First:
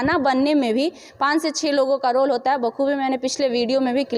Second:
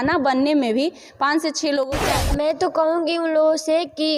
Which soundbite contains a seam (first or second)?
second